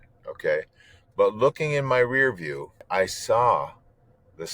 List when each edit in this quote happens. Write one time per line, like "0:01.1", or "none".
0:02.8